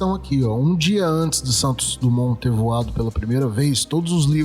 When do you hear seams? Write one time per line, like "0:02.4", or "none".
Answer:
none